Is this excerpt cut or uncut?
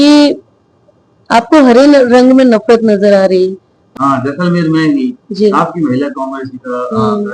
cut